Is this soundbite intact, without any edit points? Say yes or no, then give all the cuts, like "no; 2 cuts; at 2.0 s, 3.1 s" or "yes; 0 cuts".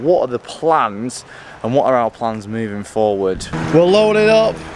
no; 1 cut; at 3.5 s